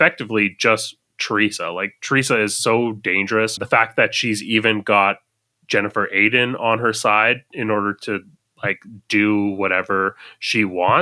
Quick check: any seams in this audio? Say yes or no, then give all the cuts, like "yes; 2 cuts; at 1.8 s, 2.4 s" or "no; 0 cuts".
yes; 1 cut; at 3.6 s